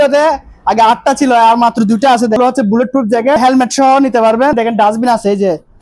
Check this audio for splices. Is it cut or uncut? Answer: cut